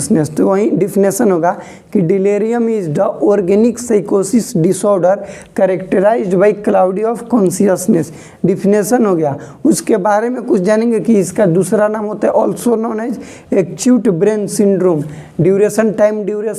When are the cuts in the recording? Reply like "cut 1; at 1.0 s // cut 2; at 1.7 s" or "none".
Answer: none